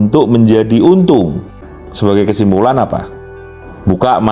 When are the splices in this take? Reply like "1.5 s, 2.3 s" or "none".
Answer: 1.6 s